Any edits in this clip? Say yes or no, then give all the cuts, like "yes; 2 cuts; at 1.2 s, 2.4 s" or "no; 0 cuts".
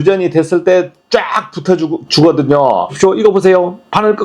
yes; 1 cut; at 2.9 s